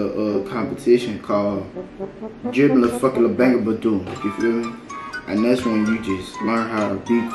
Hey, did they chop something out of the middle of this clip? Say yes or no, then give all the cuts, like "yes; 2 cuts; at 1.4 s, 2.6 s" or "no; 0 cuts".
no; 0 cuts